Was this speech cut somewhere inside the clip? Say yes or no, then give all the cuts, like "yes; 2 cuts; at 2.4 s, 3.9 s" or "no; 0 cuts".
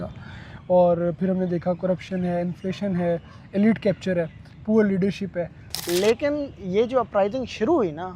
yes; 1 cut; at 5.7 s